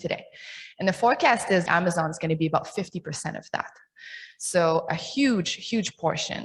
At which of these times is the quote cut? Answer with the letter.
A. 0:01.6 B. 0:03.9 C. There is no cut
A